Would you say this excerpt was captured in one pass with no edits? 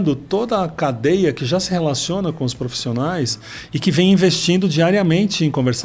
yes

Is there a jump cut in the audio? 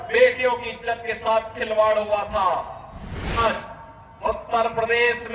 yes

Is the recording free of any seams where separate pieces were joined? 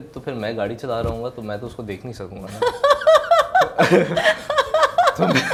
yes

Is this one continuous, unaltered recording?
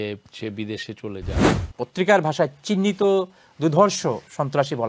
no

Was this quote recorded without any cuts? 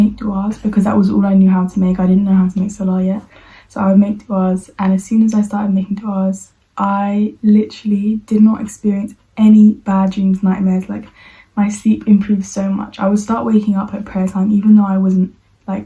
yes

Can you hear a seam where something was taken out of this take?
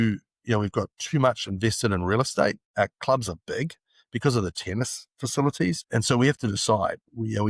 yes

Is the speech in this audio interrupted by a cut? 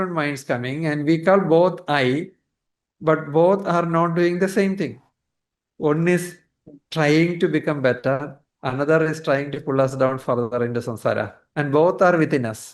yes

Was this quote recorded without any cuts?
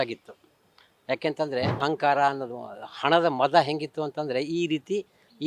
no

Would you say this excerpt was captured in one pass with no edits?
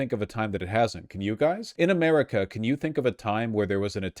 no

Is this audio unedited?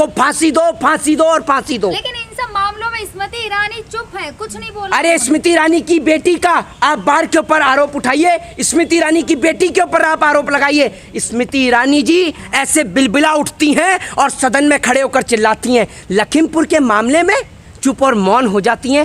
yes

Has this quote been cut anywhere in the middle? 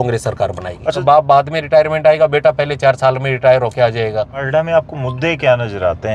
yes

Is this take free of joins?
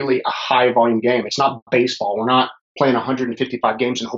yes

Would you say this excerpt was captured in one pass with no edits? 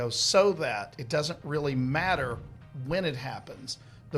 yes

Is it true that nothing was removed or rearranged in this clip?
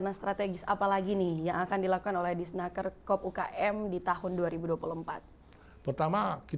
yes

